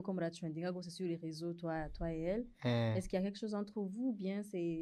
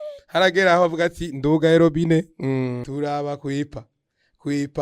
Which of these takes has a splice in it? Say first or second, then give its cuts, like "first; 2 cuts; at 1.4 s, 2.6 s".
second; 1 cut; at 2.8 s